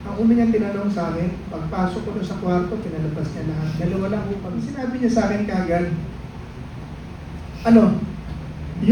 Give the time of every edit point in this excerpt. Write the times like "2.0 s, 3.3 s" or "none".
4.7 s